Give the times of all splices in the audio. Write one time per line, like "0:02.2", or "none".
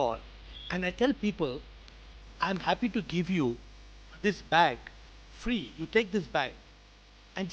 none